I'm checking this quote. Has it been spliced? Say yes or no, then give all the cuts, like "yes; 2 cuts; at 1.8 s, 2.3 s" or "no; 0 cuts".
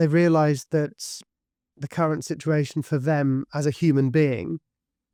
no; 0 cuts